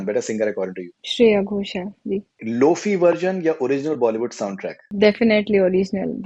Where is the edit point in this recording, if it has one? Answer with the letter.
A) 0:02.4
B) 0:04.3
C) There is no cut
A